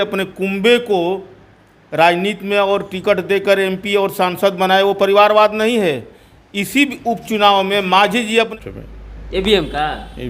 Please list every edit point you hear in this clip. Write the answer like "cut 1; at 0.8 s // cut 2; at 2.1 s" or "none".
cut 1; at 8.5 s